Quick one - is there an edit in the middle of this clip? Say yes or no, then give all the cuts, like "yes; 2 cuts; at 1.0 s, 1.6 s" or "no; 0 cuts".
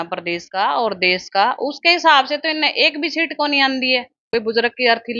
yes; 1 cut; at 4.2 s